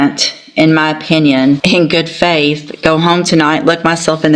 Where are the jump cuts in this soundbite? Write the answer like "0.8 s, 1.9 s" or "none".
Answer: 1.6 s